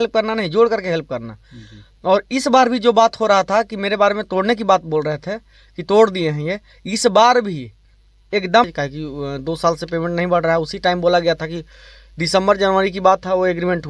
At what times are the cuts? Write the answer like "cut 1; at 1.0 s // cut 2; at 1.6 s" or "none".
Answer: cut 1; at 8.7 s